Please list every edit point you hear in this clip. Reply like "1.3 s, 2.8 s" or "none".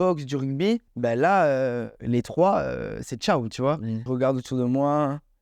0.9 s, 1.9 s, 4.0 s